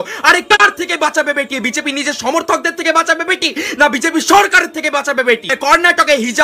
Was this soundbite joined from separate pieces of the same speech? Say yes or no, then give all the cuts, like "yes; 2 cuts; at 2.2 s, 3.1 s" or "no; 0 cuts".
no; 0 cuts